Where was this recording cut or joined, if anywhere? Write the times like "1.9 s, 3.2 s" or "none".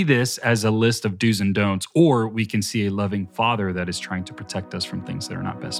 none